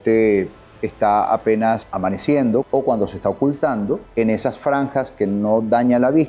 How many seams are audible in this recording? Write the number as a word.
three